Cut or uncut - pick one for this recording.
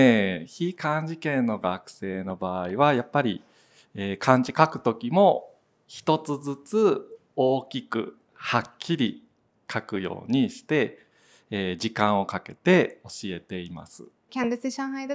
uncut